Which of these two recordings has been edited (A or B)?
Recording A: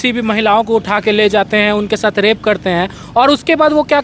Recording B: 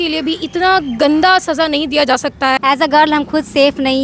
B